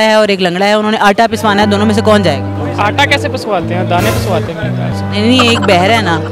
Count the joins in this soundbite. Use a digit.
0